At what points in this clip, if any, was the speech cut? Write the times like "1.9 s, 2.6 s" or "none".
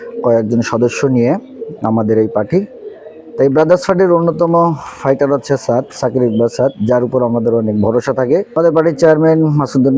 8.6 s